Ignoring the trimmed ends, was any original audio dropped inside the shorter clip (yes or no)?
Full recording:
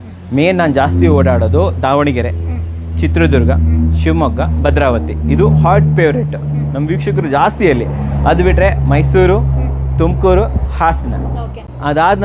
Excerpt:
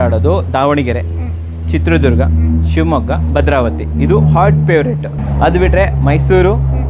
yes